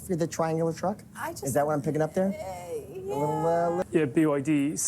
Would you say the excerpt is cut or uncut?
cut